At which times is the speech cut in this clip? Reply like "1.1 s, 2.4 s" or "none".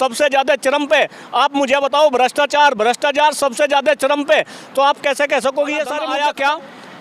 6.0 s